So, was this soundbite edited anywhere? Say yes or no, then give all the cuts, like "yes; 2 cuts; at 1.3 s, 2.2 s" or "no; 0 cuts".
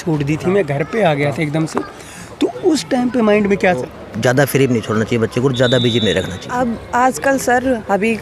yes; 2 cuts; at 3.8 s, 6.4 s